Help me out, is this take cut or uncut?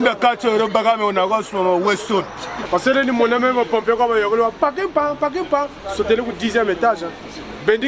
cut